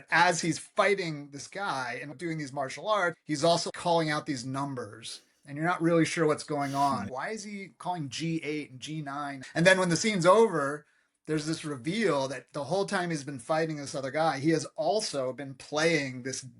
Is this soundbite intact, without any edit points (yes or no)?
no